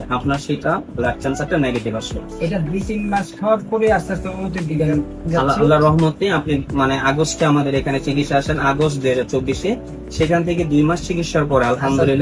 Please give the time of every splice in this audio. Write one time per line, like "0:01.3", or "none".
none